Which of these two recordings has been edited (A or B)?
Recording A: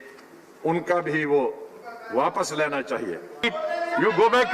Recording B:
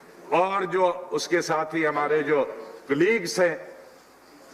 A